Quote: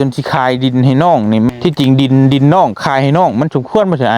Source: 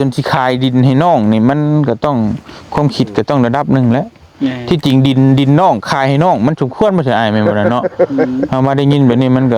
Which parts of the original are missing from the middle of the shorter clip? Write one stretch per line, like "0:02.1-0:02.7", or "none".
0:01.5-0:04.6